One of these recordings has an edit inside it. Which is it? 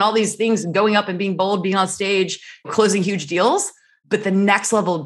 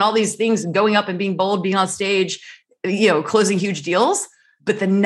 first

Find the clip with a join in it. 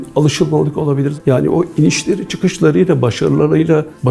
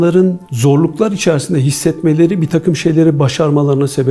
first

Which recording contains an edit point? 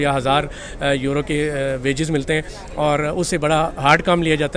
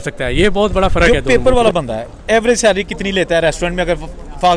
second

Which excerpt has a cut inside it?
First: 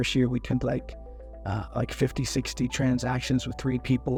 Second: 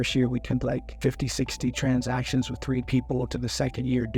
second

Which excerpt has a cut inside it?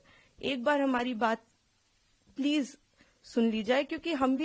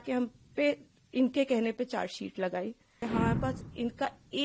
second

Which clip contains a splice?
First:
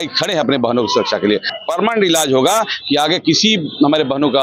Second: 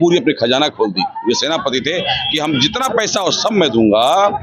first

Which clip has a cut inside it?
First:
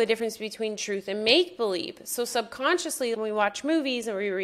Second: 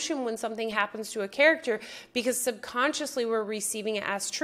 first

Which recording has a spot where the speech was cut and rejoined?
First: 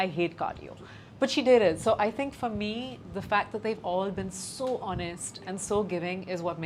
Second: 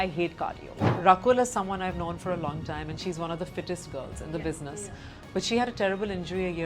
second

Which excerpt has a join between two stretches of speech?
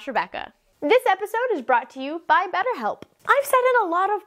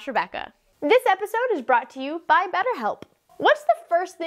first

